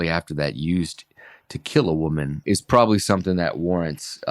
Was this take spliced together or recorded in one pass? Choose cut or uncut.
cut